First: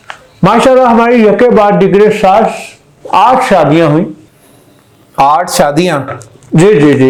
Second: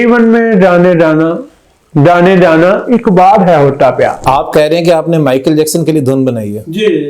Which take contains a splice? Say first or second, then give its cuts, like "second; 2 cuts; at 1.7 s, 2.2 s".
second; 1 cut; at 4.2 s